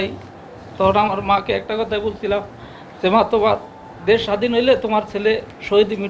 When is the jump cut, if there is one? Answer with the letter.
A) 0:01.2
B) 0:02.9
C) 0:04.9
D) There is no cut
D